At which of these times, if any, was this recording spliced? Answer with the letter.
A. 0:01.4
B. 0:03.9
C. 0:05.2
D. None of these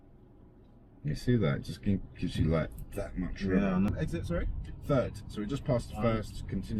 B